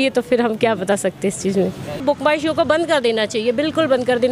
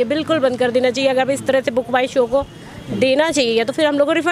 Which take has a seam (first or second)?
first